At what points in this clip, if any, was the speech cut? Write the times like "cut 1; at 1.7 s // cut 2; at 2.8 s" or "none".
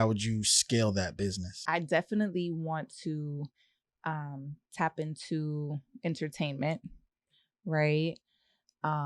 cut 1; at 1.5 s